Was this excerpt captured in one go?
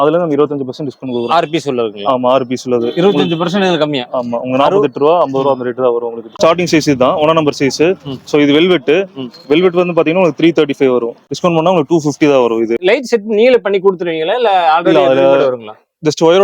no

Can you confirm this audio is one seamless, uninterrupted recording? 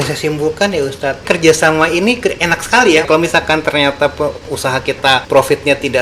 no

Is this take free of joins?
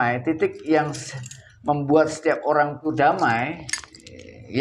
no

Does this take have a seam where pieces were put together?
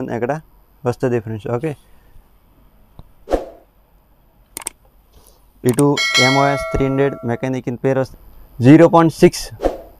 yes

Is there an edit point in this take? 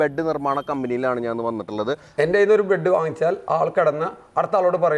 yes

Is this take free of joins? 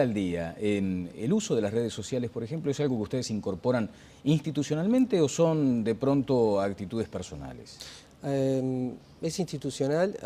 yes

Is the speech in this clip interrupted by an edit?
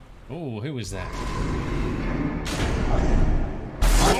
no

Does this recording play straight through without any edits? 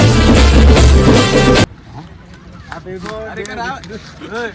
yes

